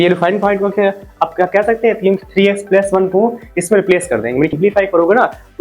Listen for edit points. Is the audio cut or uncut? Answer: cut